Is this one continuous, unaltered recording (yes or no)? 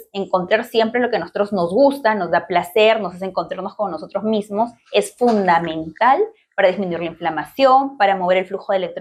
yes